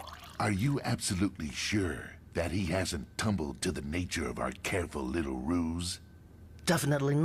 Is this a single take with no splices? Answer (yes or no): yes